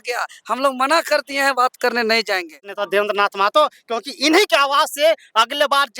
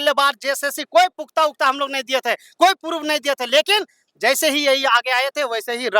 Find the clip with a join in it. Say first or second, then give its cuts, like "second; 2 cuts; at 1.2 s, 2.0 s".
first; 1 cut; at 2.7 s